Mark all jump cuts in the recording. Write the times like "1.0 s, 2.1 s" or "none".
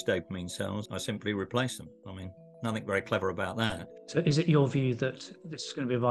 0.9 s, 4.0 s